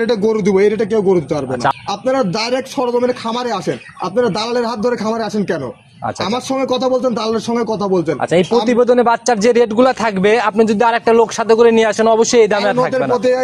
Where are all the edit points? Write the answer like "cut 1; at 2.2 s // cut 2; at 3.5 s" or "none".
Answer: cut 1; at 1.7 s